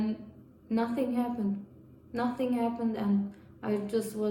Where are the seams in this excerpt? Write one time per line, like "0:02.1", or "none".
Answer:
none